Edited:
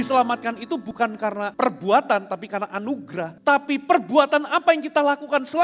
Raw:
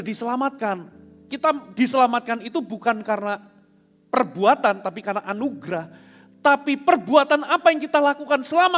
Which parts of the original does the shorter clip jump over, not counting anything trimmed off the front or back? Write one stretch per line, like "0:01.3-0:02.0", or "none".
0:02.7-0:03.4
0:05.9-0:06.3

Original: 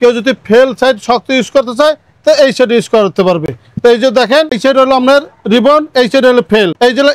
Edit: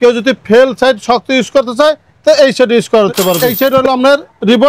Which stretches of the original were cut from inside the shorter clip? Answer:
0:03.5-0:04.5

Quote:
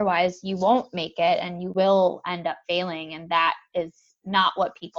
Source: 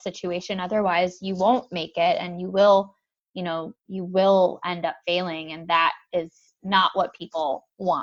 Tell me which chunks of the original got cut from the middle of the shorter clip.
0:02.4-0:04.0

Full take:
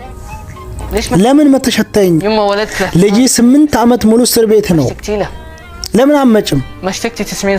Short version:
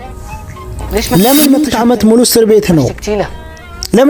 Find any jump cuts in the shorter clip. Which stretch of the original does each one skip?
0:01.7-0:03.7

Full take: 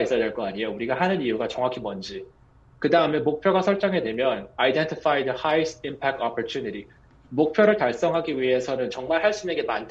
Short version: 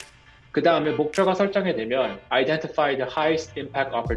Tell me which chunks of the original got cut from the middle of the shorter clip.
none

